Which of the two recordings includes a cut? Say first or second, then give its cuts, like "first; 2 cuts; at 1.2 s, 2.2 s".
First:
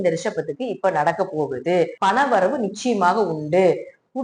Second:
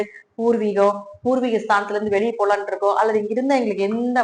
first; 1 cut; at 1.9 s